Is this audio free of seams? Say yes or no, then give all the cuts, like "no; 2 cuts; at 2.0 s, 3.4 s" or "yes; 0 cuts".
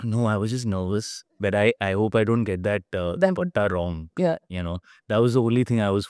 yes; 0 cuts